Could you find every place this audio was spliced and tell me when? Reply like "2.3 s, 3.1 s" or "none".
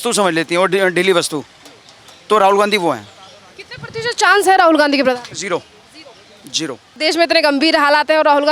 7.0 s